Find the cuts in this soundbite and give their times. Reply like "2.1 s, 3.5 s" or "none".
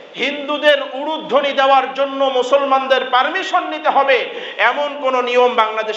none